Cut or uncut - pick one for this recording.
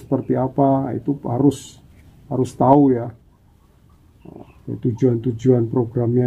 cut